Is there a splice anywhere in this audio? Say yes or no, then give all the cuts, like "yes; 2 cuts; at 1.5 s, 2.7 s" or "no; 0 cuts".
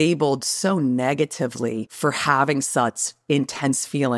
yes; 1 cut; at 1.9 s